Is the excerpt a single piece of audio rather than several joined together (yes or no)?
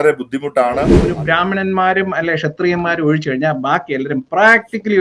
no